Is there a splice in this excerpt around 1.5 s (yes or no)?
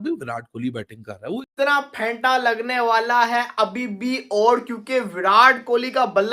yes